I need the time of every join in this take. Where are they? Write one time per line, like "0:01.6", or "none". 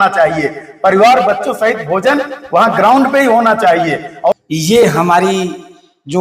0:04.3